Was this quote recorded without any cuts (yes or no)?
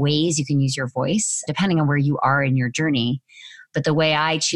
yes